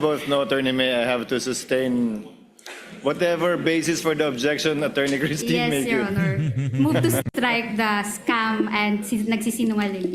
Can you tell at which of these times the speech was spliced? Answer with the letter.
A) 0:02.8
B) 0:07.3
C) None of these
B